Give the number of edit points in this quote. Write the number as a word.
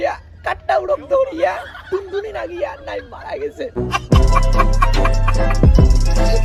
zero